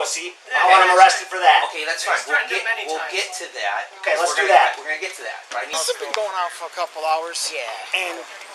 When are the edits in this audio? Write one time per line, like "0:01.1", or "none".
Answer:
0:05.7

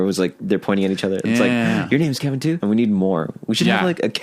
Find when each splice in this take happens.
0:02.6

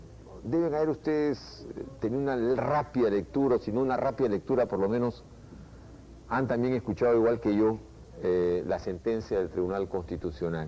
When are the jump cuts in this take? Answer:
none

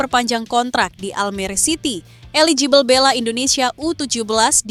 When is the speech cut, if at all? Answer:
none

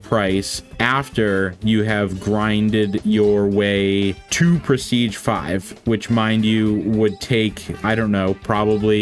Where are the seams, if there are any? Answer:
none

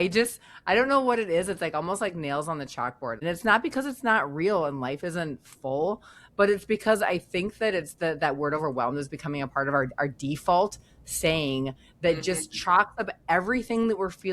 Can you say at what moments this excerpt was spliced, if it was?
0:03.2

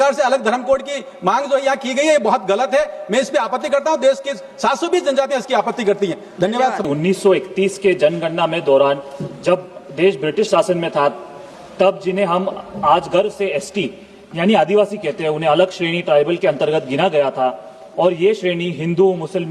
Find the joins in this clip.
0:06.8

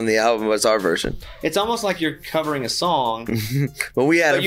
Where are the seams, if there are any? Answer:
none

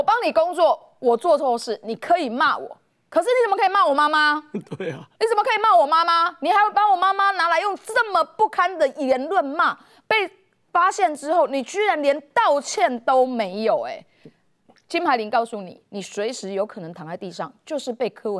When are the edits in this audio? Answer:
none

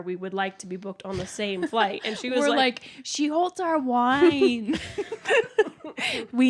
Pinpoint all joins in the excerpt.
none

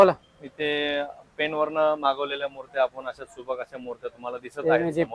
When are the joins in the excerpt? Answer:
none

